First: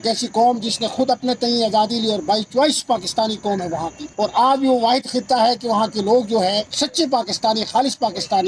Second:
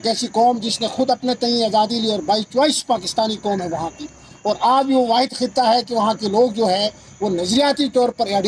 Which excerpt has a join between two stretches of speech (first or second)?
first